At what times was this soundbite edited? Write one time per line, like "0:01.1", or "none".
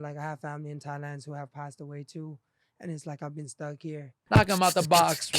0:04.2